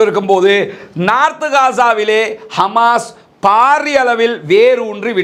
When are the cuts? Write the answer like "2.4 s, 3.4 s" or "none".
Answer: none